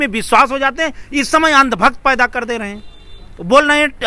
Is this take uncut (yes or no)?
yes